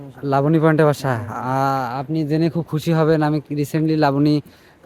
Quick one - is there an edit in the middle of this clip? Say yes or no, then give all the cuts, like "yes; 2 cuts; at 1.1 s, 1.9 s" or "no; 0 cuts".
no; 0 cuts